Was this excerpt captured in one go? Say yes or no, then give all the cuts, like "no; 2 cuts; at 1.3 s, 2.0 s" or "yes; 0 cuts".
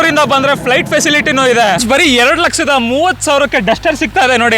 no; 1 cut; at 1.8 s